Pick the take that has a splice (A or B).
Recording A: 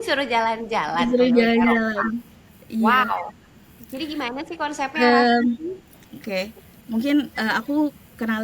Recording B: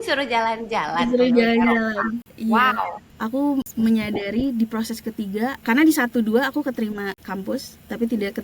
B